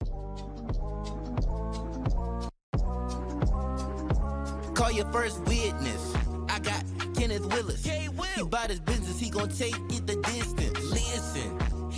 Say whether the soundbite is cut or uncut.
uncut